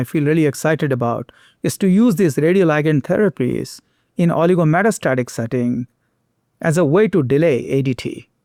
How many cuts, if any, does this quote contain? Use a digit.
0